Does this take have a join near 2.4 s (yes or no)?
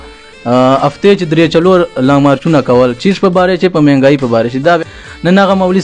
no